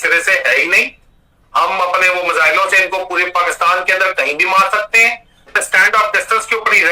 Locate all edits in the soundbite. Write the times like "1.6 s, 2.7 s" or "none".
5.6 s